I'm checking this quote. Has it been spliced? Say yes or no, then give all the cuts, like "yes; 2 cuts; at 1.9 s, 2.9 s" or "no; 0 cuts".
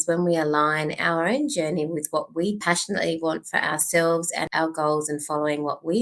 yes; 2 cuts; at 2.6 s, 4.5 s